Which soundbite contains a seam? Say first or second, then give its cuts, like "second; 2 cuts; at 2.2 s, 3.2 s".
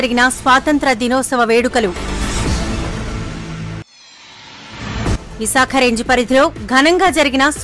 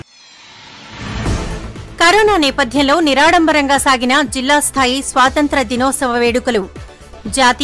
second; 1 cut; at 1.3 s